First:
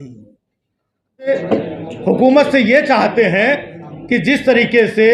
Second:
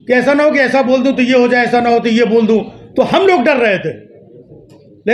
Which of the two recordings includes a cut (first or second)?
first